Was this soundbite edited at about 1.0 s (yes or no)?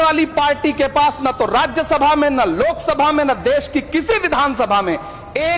no